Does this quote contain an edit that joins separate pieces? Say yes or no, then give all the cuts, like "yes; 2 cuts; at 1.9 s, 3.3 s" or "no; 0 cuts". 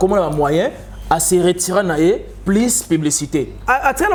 no; 0 cuts